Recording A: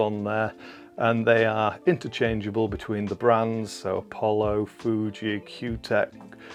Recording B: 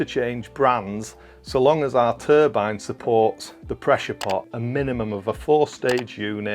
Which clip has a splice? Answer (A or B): B